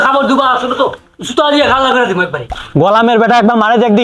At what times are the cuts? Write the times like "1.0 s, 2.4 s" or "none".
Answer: none